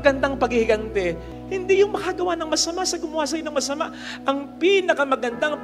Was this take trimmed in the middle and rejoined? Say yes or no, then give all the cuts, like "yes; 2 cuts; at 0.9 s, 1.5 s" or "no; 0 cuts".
yes; 1 cut; at 1.3 s